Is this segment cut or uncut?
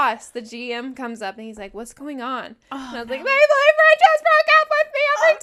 uncut